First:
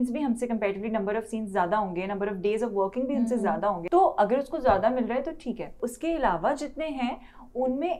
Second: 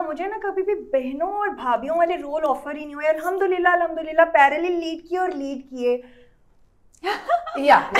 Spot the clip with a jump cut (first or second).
first